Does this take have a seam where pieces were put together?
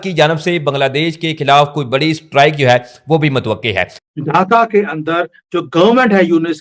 yes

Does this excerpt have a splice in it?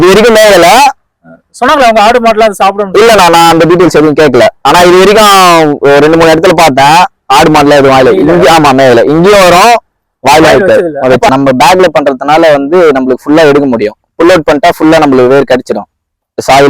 yes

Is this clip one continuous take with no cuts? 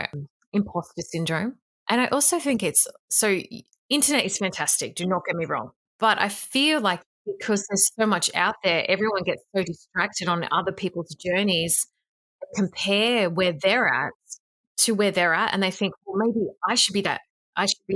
no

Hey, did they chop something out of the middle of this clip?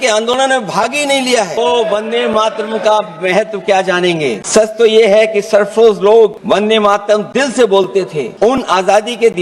yes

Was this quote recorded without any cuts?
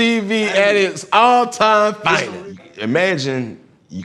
no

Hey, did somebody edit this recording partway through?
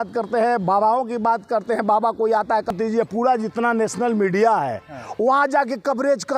yes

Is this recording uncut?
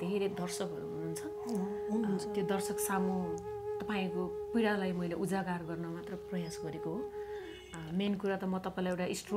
yes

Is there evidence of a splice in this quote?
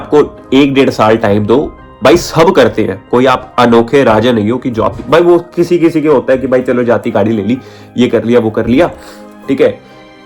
no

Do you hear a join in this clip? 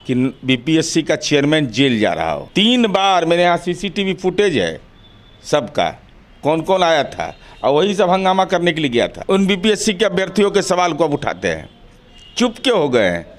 yes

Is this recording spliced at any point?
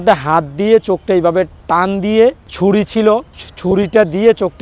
no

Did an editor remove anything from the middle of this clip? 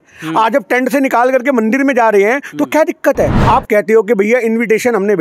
yes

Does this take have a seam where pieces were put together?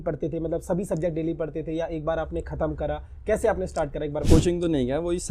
yes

